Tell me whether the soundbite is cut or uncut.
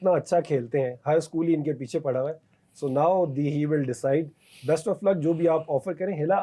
uncut